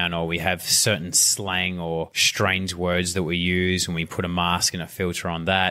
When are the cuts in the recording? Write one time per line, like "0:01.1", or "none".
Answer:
0:02.2